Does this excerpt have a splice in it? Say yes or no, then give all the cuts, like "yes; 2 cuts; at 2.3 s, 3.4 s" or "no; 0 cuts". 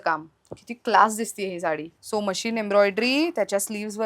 yes; 1 cut; at 1.9 s